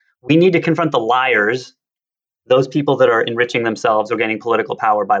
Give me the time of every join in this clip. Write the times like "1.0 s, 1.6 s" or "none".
none